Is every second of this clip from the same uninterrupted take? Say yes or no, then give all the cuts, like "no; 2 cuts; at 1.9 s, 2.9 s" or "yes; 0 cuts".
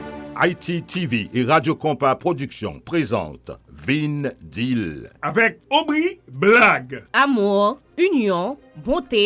no; 1 cut; at 5.0 s